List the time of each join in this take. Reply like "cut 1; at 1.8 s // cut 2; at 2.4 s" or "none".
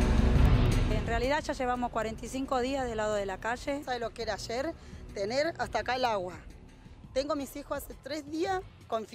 cut 1; at 1.0 s // cut 2; at 3.8 s